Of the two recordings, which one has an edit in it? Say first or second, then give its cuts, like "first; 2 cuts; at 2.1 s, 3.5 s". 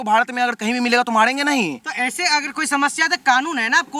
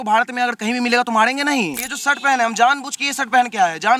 second; 1 cut; at 1.9 s